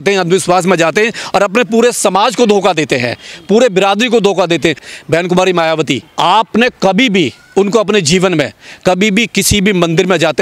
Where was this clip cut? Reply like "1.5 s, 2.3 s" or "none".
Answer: 4.8 s

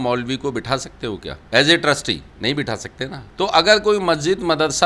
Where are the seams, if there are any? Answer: 1.3 s, 2.3 s, 3.2 s

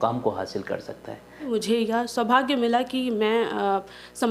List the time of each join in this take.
1.4 s

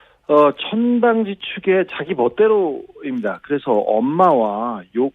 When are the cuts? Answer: 1.3 s

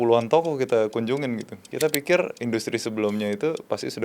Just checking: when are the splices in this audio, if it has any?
1.6 s

